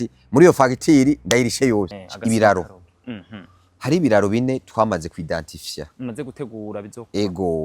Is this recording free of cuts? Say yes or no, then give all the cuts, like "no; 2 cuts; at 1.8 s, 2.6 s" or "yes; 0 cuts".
no; 1 cut; at 2.0 s